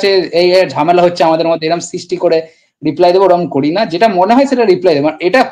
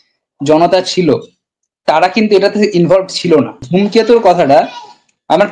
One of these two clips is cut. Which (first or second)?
second